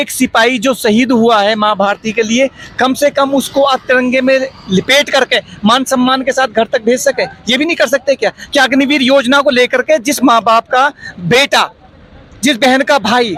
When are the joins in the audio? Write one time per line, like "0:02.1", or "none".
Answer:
none